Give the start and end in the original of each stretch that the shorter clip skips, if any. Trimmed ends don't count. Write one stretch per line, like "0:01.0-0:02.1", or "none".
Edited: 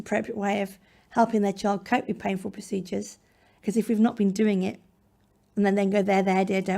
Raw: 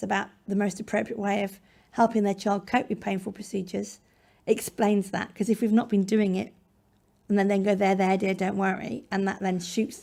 0:04.4-0:05.3